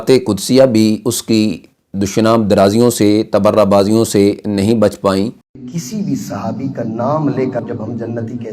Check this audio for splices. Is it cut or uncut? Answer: cut